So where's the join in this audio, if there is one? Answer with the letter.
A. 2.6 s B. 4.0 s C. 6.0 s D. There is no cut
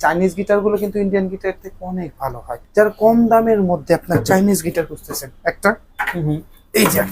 A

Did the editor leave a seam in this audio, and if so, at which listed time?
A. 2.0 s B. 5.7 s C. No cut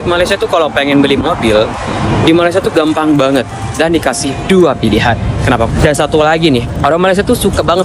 B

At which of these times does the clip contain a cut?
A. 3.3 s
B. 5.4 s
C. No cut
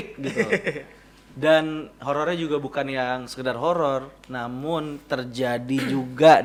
C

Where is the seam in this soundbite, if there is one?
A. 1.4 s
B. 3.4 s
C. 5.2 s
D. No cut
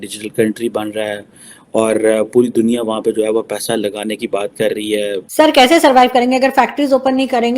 C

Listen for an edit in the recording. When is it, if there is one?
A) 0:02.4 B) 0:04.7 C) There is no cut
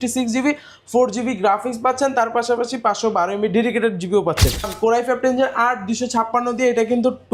B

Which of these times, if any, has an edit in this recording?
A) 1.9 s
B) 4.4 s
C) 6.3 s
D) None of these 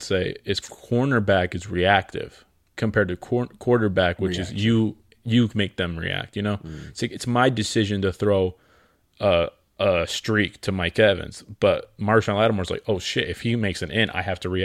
D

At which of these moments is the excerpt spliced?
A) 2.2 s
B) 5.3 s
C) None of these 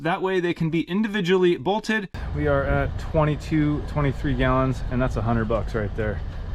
A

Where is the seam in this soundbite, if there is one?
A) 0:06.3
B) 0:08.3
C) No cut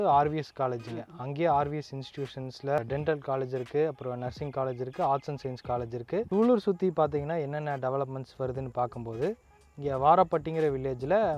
A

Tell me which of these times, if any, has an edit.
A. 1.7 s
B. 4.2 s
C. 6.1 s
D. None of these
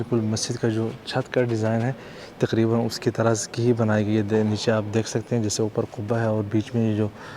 D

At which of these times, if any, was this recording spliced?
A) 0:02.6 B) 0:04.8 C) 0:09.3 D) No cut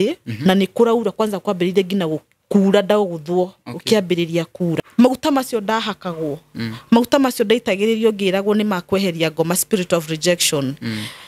B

